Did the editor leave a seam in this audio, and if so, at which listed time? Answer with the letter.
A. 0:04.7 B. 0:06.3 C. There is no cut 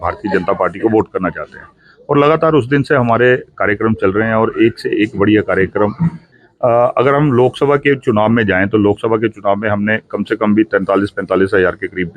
B